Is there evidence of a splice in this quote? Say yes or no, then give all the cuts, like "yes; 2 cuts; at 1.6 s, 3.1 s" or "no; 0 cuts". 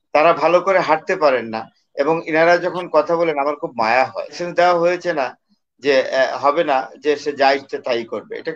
yes; 1 cut; at 4.4 s